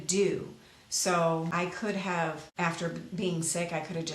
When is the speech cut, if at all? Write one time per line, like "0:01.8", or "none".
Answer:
0:01.5
0:02.5